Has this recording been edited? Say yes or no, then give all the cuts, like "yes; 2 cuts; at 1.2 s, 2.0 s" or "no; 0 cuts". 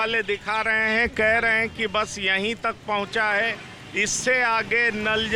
no; 0 cuts